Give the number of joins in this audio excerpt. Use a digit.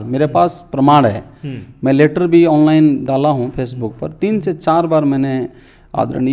0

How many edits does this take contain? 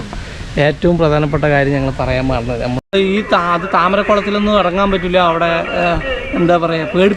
1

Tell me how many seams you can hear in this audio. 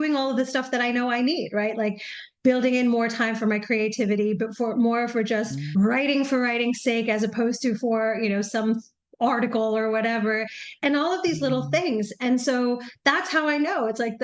0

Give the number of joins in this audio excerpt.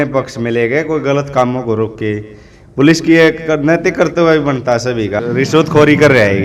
1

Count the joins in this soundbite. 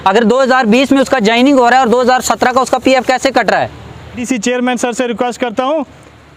1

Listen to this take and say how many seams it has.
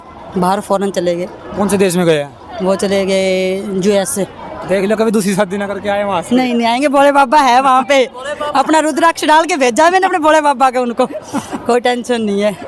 0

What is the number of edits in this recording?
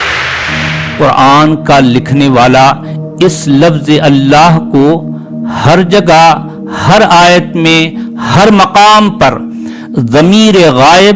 0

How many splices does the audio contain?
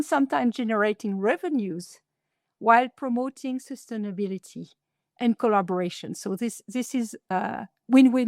1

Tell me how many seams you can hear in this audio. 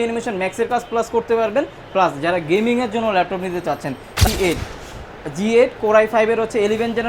1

